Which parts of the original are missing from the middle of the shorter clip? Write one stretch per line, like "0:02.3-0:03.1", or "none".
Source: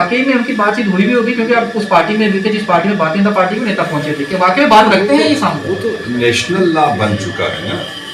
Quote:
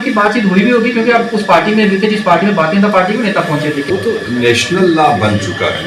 0:04.2-0:05.6